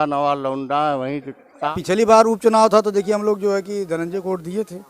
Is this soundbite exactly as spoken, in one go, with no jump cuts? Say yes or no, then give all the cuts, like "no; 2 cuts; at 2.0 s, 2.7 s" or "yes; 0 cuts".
no; 1 cut; at 1.7 s